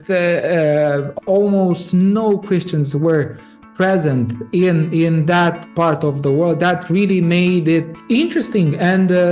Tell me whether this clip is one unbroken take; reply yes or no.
no